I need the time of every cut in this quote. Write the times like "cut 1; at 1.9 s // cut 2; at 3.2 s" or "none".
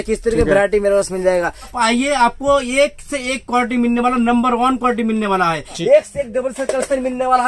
cut 1; at 1.7 s // cut 2; at 5.8 s